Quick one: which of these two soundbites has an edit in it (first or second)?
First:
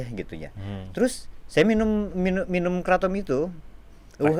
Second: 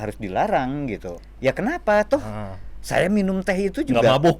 second